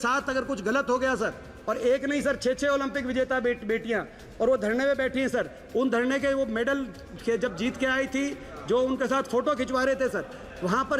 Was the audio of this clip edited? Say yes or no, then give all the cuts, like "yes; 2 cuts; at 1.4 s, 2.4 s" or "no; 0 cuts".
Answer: no; 0 cuts